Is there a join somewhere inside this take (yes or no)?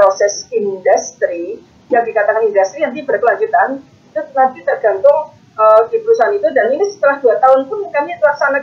no